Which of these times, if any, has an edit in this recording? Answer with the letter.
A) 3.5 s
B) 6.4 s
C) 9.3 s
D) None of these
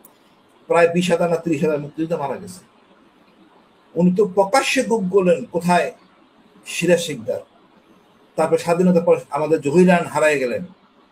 D